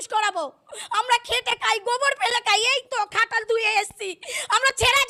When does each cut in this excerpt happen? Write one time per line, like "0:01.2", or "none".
none